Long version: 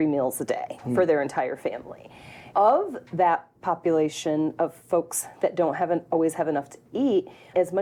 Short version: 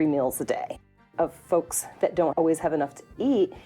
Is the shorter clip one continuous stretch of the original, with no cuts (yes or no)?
no